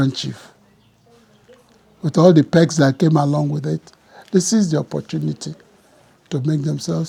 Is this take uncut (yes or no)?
yes